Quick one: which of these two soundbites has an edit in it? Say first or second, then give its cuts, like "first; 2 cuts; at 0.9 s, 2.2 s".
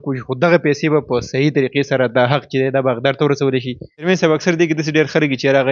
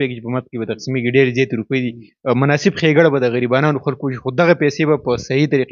first; 1 cut; at 3.9 s